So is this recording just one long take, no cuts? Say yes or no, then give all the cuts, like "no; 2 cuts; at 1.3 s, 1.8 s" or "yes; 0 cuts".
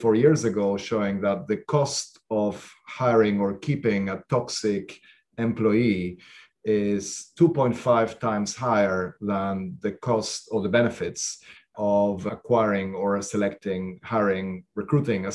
yes; 0 cuts